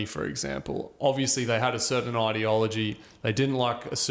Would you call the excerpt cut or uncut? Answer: uncut